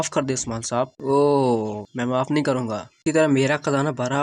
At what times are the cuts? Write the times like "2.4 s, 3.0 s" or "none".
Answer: 1.0 s, 3.0 s